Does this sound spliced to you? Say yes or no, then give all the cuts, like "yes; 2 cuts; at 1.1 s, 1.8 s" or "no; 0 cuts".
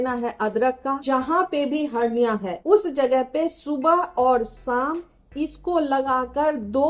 yes; 2 cuts; at 1.0 s, 2.5 s